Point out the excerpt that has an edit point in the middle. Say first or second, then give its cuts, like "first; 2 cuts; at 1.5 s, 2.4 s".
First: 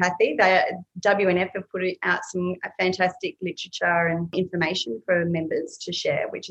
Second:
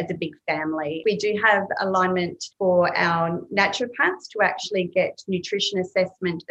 second; 2 cuts; at 1.0 s, 2.4 s